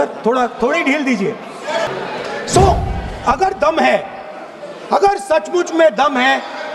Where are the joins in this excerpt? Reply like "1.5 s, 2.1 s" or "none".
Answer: 1.9 s